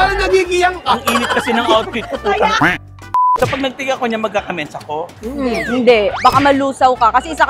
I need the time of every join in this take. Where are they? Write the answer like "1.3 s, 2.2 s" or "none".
3.0 s